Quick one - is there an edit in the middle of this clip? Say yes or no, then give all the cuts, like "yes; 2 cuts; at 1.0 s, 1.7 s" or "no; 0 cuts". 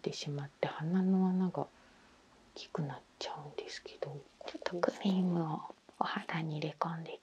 yes; 1 cut; at 4.4 s